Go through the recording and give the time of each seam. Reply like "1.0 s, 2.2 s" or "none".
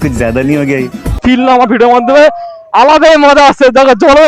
1.2 s

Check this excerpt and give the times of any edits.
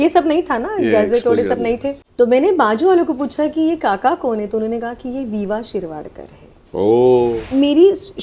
2.0 s, 7.4 s

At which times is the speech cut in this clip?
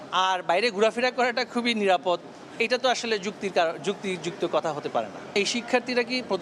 none

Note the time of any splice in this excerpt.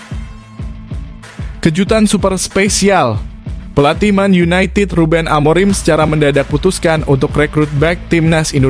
1.6 s

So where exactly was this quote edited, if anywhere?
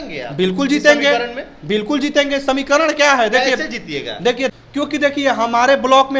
4.5 s

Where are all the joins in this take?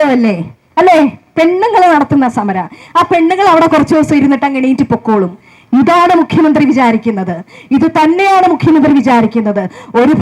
none

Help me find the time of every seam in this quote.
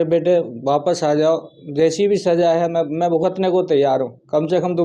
none

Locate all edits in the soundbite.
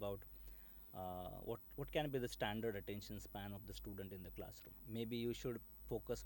4.7 s

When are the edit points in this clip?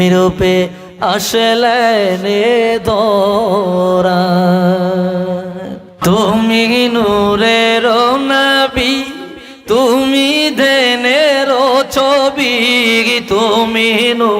6.0 s

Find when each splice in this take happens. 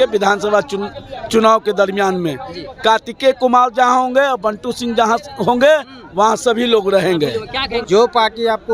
7.8 s

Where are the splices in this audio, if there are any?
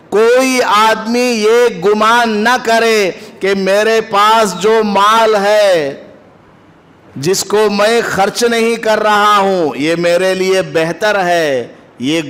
none

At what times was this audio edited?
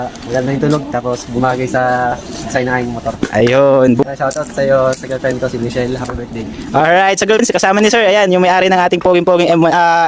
4.0 s, 7.4 s

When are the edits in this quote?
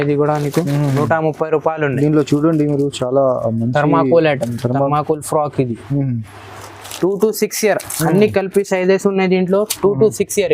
6.8 s

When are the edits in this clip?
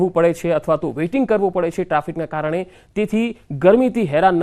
1.4 s

